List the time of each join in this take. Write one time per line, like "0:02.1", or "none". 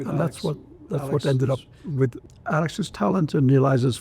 0:02.2